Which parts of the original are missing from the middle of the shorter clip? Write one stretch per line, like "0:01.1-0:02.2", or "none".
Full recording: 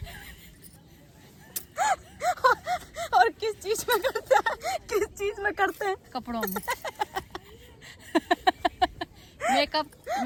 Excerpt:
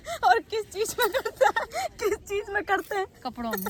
none